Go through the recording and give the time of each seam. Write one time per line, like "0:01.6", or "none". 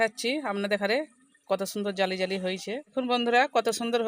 0:02.9